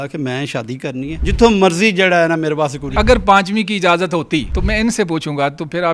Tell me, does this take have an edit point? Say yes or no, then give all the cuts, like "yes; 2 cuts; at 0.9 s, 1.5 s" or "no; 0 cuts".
yes; 3 cuts; at 1.2 s, 2.9 s, 4.5 s